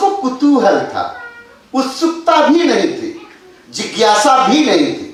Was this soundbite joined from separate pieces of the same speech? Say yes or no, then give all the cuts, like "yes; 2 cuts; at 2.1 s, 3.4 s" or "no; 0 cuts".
no; 0 cuts